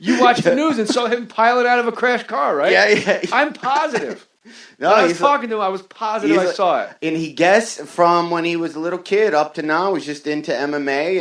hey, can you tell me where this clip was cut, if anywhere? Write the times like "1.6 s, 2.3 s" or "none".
5.5 s